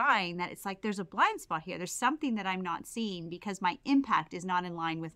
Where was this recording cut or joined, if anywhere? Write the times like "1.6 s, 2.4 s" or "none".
none

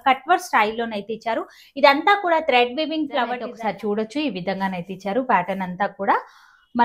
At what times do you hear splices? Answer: 3.5 s

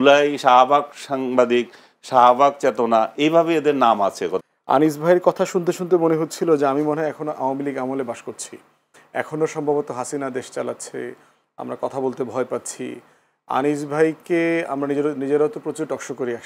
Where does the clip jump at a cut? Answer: 4.5 s

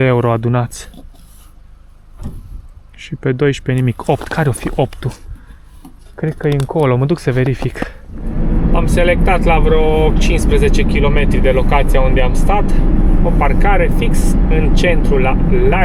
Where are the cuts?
8.3 s

